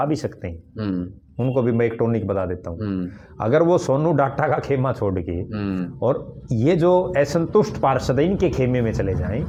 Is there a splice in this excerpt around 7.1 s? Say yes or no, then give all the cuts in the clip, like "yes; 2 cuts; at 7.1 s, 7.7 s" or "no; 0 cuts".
no; 0 cuts